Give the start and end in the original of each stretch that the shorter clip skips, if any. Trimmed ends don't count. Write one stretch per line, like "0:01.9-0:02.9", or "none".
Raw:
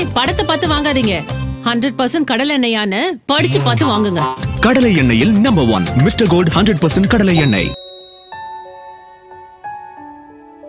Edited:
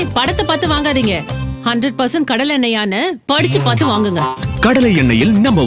none